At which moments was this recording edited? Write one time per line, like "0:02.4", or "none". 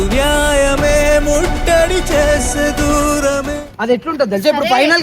0:03.5